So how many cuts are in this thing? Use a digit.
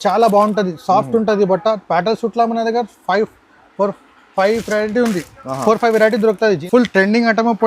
1